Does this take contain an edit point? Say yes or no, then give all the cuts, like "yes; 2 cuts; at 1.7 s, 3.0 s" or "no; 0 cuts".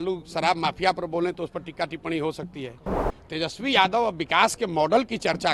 yes; 1 cut; at 3.0 s